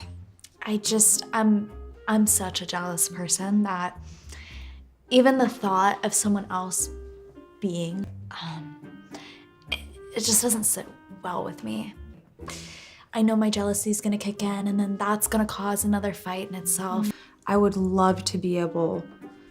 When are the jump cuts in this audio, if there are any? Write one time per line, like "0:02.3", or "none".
0:12.2
0:17.1